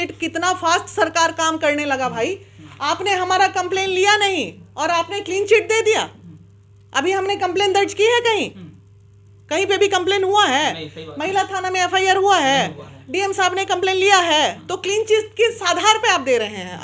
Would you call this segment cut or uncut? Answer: uncut